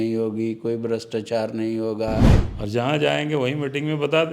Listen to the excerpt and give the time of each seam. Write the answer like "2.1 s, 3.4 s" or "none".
2.4 s

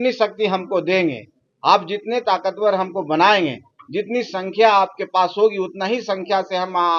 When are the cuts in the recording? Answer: none

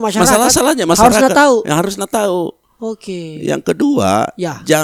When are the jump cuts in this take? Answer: none

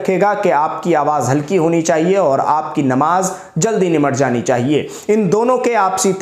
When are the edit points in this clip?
none

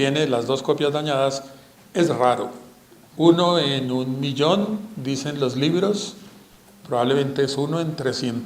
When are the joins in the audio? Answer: none

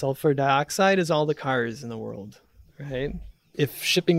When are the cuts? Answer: none

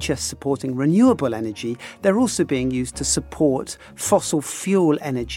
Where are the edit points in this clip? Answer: none

